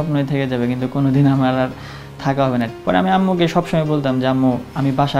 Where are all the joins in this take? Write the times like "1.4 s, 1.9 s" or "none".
2.7 s